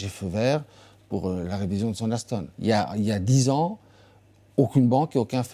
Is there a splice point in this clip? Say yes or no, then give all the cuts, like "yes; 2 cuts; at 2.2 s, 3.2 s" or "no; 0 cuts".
yes; 1 cut; at 2.5 s